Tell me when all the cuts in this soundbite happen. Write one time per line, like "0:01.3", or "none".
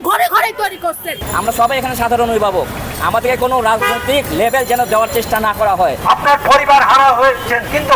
0:01.2
0:06.0